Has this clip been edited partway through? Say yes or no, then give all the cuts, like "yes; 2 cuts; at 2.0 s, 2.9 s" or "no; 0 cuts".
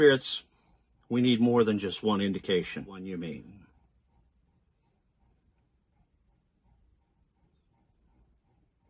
yes; 1 cut; at 3.0 s